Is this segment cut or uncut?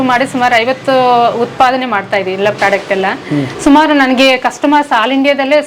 uncut